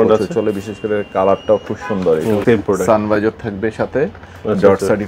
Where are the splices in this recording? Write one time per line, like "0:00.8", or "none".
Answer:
0:02.4